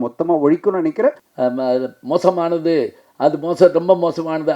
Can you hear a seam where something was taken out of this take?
yes; 1 cut; at 1.3 s

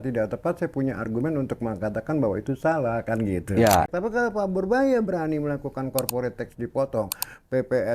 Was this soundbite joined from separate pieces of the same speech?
yes; 1 cut; at 3.9 s

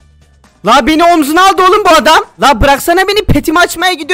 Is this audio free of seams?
yes; 0 cuts

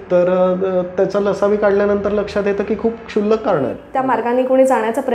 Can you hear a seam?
yes; 1 cut; at 3.8 s

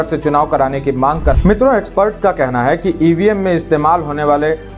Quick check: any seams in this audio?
yes; 1 cut; at 1.3 s

